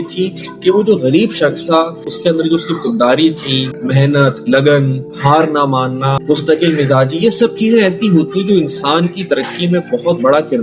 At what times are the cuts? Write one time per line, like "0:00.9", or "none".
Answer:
0:02.0
0:03.7
0:06.2